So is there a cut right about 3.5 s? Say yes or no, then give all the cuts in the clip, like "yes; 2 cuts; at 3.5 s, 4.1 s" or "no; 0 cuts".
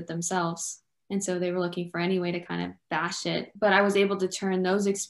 yes; 1 cut; at 3.5 s